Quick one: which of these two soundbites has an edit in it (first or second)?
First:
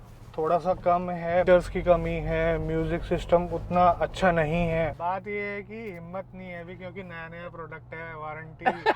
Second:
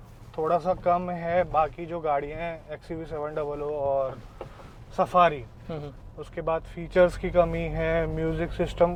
first